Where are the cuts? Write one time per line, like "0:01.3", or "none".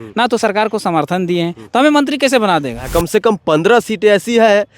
0:02.9